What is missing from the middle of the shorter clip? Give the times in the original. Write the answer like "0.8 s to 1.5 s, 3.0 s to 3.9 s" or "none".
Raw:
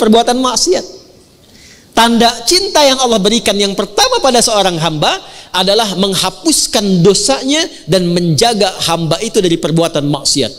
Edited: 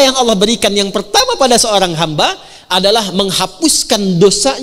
none